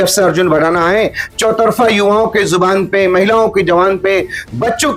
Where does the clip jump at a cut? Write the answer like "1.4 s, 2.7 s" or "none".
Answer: none